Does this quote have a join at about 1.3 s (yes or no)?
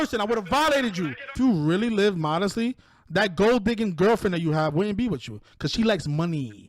yes